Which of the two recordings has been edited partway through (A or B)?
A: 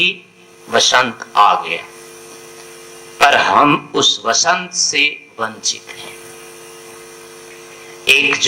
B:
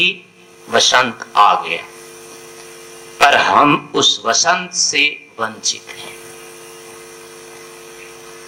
A